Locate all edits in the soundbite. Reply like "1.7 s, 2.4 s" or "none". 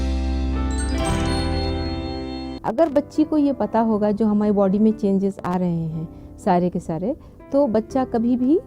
2.5 s